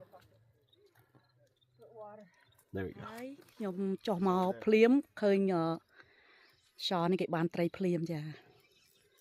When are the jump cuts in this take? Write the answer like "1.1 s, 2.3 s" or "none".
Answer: 3.0 s